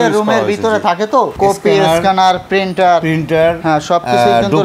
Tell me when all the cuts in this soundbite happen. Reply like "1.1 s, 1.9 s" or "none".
1.3 s

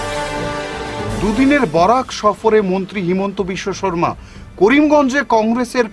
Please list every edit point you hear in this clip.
none

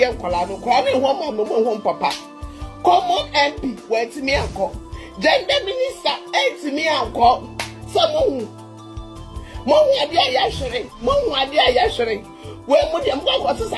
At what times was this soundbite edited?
none

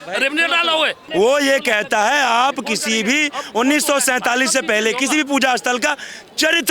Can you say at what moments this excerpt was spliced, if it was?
1.0 s

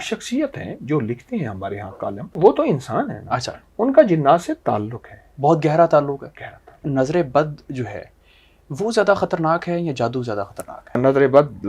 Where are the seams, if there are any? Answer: 2.2 s, 6.8 s, 11.0 s

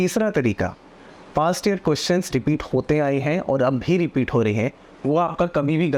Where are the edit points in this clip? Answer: none

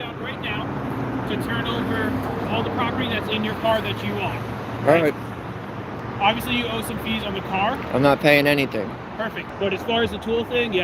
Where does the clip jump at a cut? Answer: 9.5 s

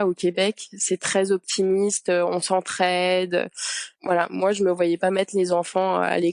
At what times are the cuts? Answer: none

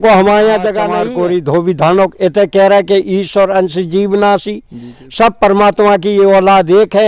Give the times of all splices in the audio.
0.9 s

